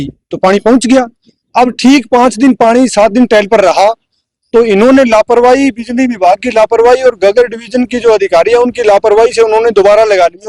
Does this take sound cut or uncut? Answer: uncut